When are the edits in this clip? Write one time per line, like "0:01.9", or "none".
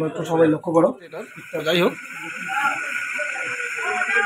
0:01.6